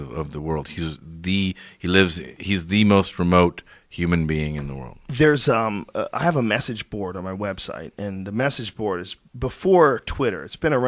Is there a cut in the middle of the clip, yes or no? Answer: no